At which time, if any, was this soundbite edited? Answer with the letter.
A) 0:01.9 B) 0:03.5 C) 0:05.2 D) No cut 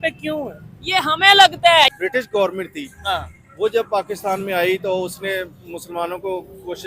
A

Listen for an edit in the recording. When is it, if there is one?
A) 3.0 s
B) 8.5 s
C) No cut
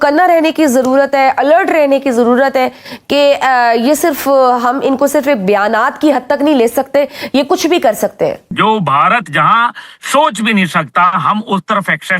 B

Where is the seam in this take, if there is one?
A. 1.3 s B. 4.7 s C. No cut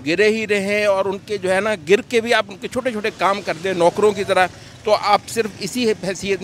C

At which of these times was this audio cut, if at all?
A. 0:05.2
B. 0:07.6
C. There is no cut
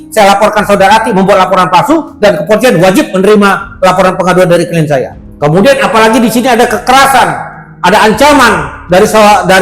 A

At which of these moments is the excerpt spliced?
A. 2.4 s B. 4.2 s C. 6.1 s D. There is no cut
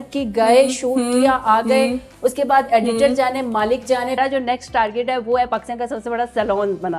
B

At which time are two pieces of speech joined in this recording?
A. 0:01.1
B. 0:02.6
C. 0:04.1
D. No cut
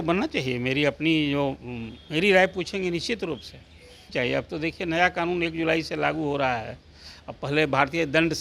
C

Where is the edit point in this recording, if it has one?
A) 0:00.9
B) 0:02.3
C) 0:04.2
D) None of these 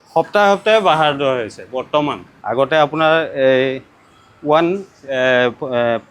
B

